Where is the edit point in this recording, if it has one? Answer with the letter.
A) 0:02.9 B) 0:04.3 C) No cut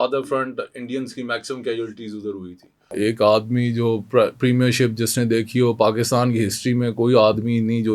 A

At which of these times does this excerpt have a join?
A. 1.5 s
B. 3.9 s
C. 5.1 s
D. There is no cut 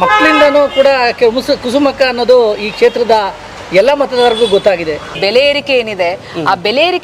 C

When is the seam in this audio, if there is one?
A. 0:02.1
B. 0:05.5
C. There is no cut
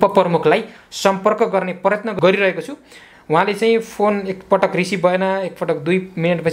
A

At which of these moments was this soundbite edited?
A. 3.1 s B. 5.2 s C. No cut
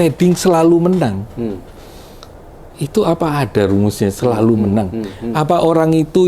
C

